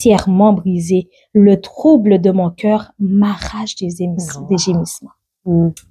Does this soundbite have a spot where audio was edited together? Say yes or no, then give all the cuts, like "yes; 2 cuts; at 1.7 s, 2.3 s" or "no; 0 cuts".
no; 0 cuts